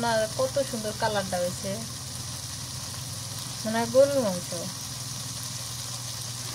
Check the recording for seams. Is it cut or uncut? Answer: uncut